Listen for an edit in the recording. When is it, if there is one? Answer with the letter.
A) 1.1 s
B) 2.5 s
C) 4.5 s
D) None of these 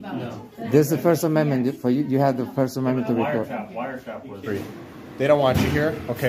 C